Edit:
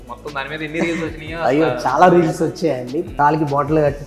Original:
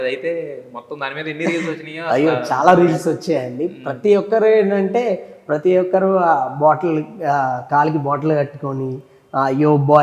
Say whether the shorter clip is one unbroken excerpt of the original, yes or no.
no